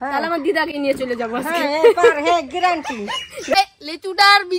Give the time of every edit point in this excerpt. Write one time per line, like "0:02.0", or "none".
0:03.5